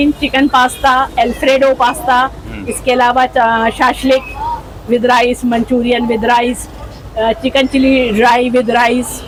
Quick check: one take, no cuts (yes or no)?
yes